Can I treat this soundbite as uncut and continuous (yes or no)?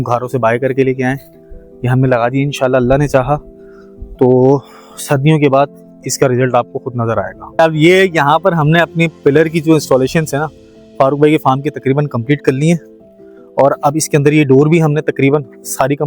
no